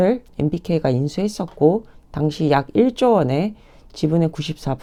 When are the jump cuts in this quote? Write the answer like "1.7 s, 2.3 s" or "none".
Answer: none